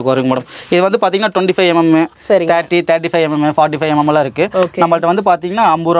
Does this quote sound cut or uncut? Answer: uncut